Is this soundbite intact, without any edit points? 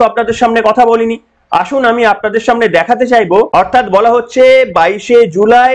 no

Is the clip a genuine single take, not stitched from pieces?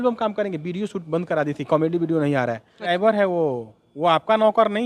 no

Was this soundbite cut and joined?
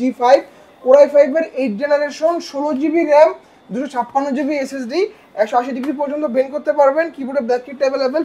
no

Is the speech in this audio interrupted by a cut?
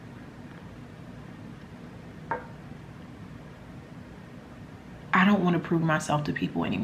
no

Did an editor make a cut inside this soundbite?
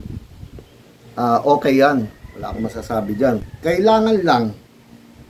yes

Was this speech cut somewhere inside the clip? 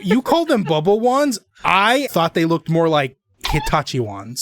yes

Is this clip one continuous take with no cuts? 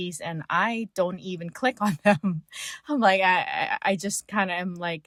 yes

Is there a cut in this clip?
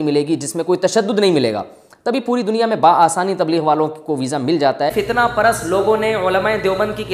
yes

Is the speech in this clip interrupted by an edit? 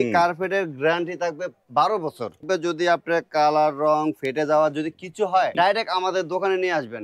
yes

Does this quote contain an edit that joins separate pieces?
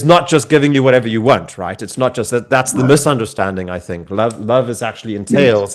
no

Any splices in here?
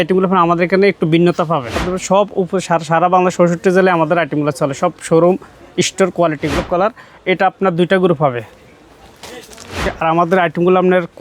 yes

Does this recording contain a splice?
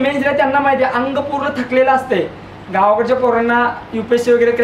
yes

